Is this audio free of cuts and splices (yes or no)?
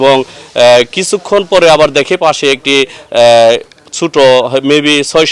yes